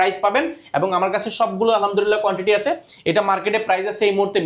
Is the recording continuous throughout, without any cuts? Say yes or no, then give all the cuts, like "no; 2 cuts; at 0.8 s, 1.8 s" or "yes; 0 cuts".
yes; 0 cuts